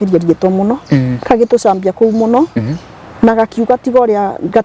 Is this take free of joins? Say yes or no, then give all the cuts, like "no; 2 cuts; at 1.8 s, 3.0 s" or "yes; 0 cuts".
yes; 0 cuts